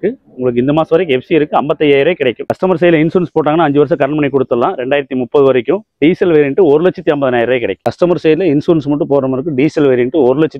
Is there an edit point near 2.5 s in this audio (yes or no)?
yes